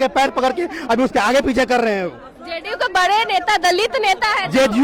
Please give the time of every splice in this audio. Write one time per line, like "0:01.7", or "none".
none